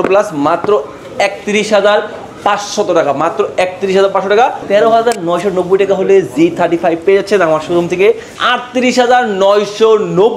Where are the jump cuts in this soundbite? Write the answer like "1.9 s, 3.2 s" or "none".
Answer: 4.6 s, 8.3 s